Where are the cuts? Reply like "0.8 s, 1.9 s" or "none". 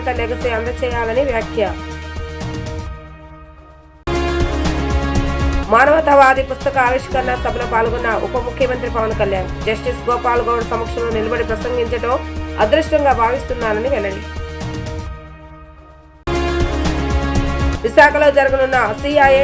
none